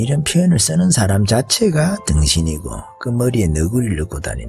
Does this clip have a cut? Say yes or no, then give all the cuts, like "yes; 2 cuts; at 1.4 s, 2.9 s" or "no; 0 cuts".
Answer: no; 0 cuts